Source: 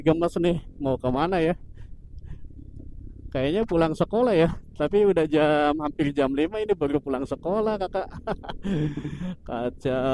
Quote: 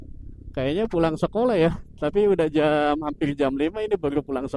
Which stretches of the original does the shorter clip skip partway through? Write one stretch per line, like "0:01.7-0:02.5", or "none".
none